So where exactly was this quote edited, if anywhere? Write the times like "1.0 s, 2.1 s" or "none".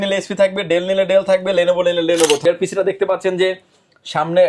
2.4 s